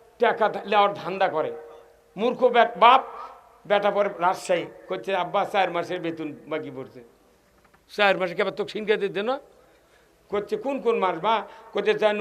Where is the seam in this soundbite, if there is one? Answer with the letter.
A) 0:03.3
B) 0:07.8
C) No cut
C